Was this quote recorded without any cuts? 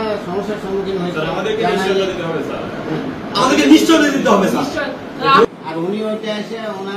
no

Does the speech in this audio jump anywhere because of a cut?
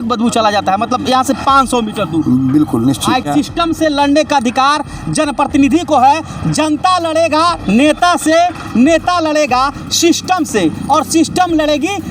yes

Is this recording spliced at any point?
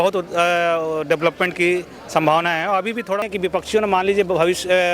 yes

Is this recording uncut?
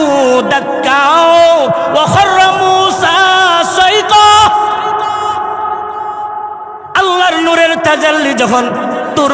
yes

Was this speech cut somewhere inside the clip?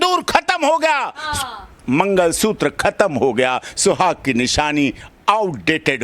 no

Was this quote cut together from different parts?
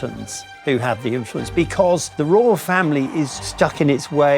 yes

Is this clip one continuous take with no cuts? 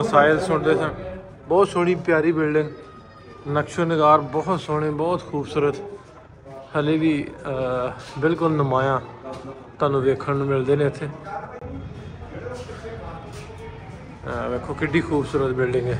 yes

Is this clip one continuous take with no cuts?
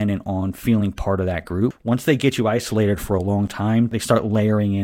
no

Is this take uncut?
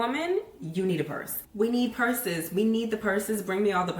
yes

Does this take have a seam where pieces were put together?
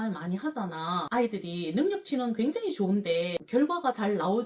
no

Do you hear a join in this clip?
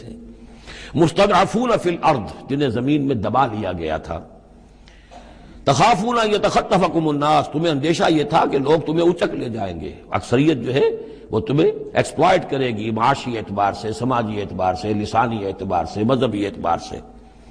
no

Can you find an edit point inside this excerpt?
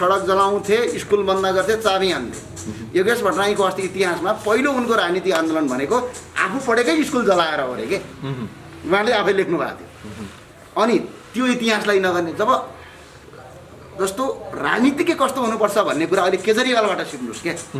no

